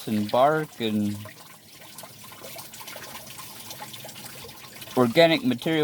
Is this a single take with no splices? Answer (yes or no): yes